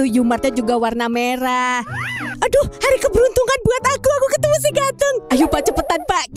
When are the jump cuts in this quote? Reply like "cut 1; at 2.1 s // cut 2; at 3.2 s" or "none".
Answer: cut 1; at 2.2 s